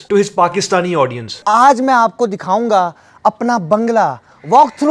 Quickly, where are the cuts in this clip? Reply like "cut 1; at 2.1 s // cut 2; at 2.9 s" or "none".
cut 1; at 1.3 s